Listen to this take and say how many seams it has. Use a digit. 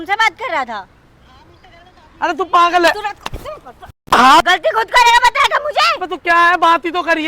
1